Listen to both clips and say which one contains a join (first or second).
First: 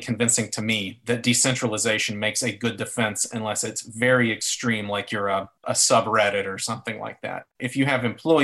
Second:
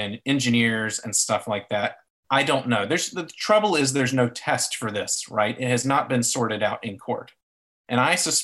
first